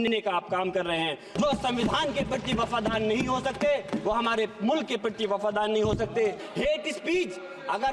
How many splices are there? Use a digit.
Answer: 2